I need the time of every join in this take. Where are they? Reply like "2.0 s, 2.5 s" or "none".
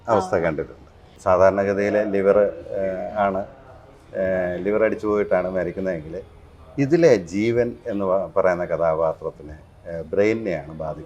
1.1 s